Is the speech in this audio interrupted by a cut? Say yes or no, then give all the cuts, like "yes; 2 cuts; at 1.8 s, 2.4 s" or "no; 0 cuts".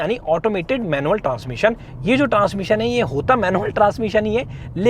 no; 0 cuts